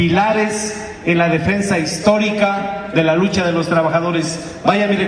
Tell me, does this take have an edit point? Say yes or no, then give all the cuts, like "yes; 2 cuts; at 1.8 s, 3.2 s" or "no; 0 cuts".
yes; 1 cut; at 2.4 s